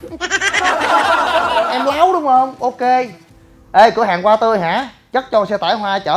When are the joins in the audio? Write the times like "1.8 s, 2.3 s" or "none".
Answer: 1.7 s